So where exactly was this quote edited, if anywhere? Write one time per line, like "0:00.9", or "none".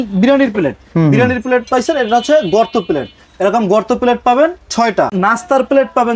0:05.1